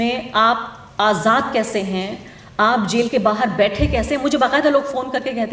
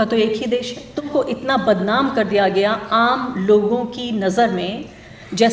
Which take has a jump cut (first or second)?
second